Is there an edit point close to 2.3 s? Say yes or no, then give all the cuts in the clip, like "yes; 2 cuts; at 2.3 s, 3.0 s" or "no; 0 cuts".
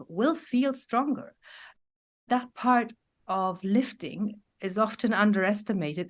yes; 1 cut; at 2.3 s